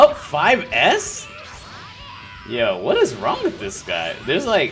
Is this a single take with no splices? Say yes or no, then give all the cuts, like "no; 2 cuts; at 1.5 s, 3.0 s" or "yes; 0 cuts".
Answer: yes; 0 cuts